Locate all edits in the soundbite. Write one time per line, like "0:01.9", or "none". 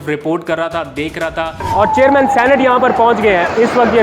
0:01.6

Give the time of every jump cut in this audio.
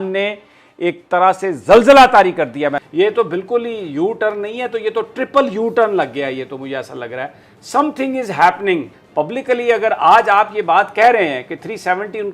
0:02.8
0:09.0

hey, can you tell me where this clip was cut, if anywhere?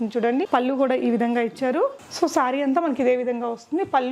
0:02.0

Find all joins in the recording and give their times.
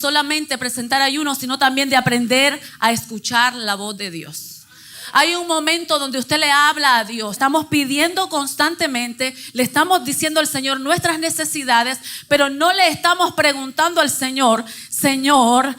0:07.4

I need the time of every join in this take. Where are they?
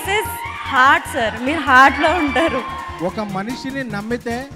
0:02.8

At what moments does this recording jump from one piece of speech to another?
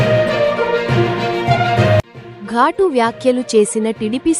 0:01.2

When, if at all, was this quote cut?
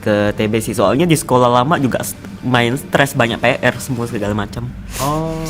none

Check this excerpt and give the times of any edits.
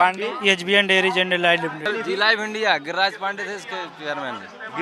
0:01.9

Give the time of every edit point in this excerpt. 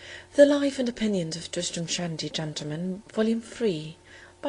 none

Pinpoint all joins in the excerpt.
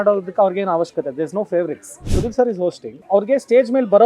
0:02.1
0:02.9

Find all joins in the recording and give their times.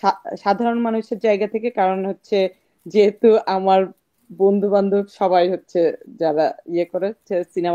none

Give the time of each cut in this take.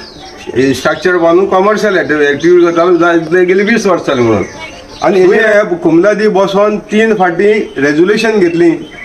0:05.4

